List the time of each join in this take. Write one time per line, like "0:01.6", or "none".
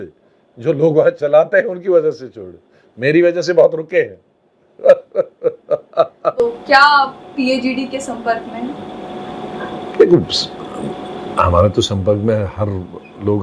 0:06.4